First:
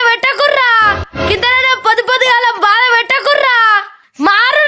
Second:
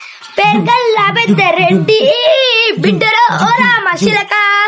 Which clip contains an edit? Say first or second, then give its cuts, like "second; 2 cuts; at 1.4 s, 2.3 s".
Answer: first; 2 cuts; at 1.1 s, 3.8 s